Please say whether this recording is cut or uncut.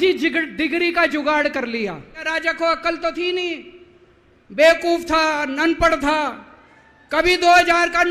cut